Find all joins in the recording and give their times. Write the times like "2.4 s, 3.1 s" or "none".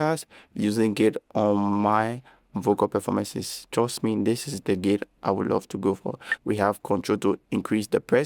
6.2 s